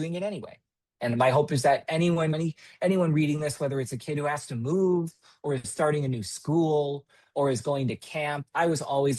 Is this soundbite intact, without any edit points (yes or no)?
no